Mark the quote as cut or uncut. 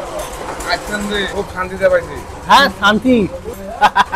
uncut